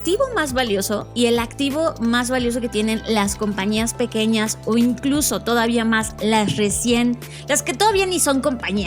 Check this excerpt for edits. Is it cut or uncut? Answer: cut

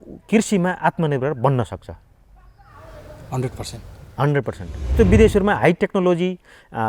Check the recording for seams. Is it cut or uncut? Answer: cut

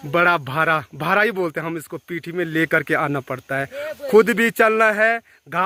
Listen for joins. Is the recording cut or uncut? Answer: uncut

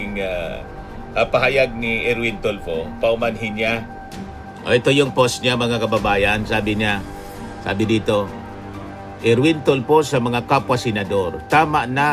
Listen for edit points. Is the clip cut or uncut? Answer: uncut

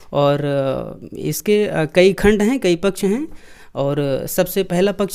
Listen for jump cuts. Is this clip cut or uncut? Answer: uncut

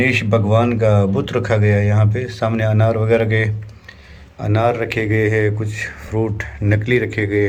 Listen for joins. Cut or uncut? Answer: uncut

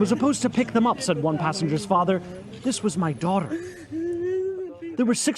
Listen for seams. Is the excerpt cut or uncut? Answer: cut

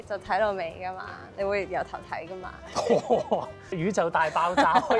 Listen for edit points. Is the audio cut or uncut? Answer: uncut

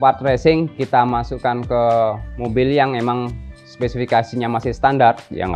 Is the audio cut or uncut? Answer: uncut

